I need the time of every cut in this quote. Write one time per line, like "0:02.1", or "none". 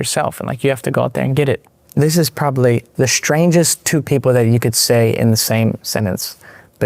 0:01.7
0:02.9